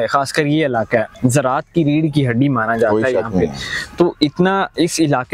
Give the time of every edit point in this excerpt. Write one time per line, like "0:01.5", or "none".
none